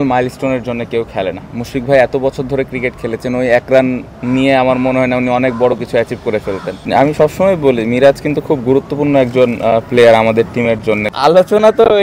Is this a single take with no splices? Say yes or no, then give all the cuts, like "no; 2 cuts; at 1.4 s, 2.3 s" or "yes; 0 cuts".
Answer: no; 2 cuts; at 6.8 s, 11.0 s